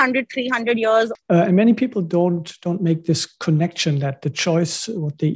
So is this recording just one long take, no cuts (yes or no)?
no